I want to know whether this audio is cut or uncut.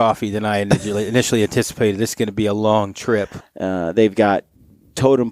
cut